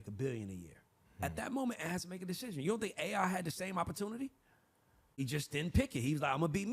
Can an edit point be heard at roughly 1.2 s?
no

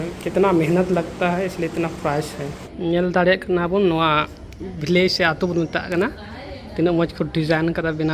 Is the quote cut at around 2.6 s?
yes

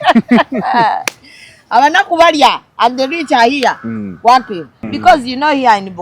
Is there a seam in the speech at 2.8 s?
no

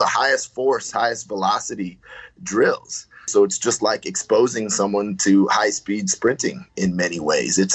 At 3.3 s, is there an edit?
yes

